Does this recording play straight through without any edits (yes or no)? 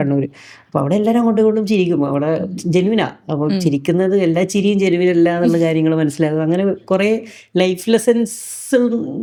yes